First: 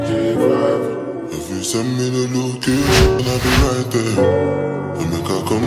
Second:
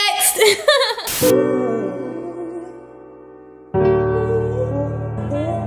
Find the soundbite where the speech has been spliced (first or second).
second